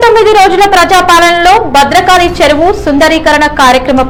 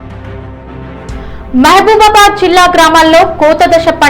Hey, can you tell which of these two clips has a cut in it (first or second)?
second